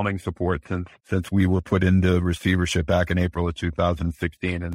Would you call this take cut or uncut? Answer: uncut